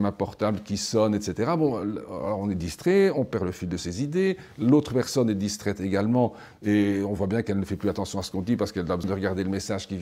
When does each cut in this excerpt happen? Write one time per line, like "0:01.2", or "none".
0:09.0